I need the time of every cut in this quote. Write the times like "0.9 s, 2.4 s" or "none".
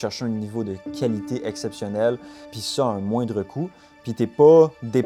0.9 s, 2.5 s